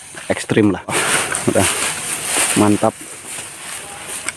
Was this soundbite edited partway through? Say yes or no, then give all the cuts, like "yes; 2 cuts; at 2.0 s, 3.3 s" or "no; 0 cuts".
yes; 1 cut; at 0.9 s